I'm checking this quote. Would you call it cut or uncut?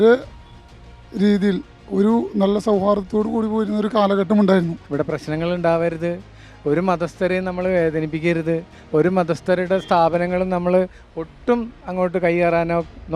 cut